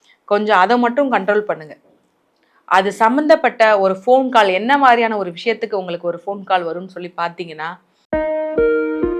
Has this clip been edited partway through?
yes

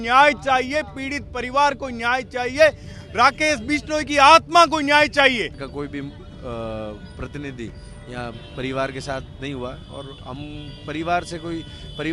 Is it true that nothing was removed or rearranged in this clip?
no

